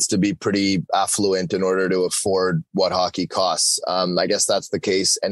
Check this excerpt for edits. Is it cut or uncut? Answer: uncut